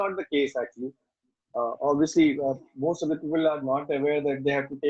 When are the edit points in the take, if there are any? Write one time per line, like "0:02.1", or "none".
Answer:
none